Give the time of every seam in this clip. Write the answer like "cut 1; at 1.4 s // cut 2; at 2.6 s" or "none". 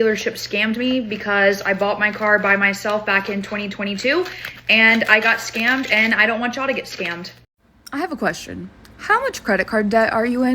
cut 1; at 7.9 s